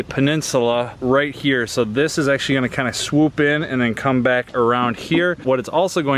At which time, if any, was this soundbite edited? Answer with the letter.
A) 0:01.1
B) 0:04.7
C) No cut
C